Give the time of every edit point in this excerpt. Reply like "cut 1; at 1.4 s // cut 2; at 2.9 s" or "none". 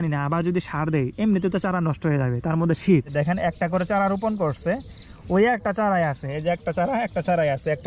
cut 1; at 3.1 s